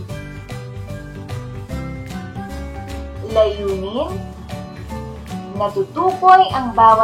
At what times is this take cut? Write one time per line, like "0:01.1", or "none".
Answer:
0:03.2
0:04.2
0:05.5